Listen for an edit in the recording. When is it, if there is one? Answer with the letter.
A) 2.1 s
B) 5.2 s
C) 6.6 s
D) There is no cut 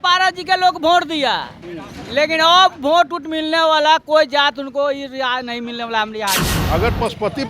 C